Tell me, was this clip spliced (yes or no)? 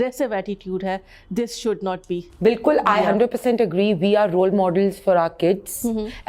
no